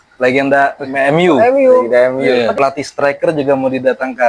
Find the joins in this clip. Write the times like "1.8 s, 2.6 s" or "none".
2.5 s